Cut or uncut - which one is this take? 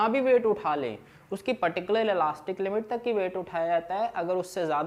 uncut